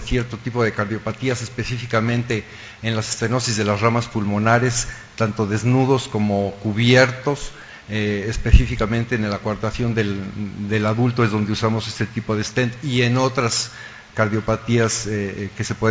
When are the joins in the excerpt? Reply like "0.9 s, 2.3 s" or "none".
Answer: 12.3 s